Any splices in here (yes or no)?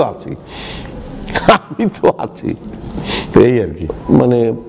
yes